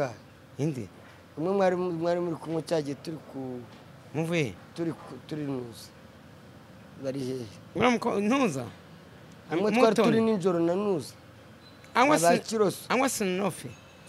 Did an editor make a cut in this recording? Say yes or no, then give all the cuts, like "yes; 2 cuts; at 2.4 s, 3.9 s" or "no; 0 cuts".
no; 0 cuts